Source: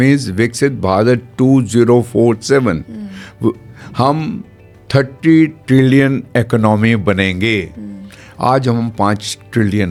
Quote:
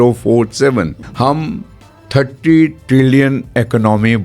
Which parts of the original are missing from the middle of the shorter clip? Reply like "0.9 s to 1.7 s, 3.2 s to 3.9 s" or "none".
2.9 s to 3.8 s